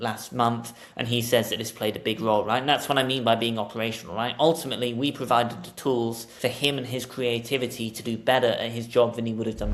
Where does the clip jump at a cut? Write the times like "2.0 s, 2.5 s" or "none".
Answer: 6.3 s